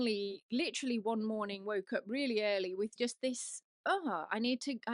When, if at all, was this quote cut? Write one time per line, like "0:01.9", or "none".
none